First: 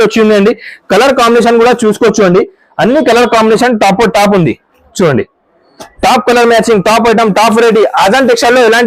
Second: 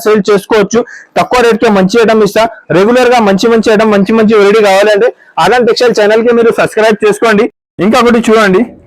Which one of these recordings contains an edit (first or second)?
second